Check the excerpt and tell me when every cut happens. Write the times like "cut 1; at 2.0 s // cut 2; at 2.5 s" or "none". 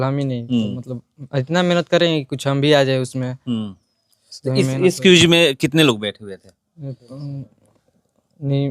none